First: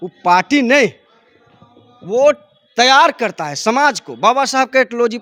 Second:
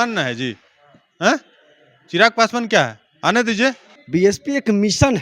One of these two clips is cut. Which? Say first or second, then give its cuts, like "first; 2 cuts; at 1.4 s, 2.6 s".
second; 1 cut; at 3.9 s